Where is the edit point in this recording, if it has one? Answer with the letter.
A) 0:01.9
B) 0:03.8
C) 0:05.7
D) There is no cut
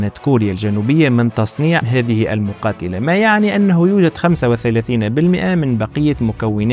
A